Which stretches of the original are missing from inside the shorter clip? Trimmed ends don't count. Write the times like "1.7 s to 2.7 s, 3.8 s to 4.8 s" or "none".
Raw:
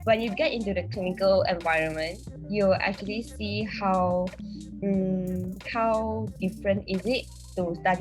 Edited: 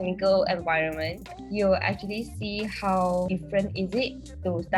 4.3 s to 6.4 s